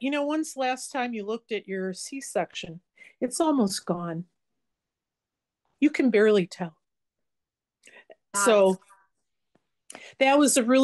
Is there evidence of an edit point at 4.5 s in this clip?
no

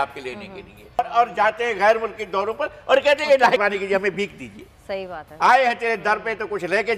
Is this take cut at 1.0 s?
yes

